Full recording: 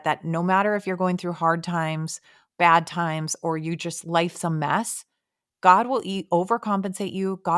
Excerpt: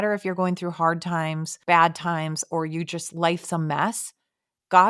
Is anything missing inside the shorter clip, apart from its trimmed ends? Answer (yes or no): yes